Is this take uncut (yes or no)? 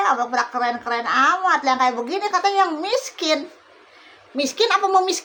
yes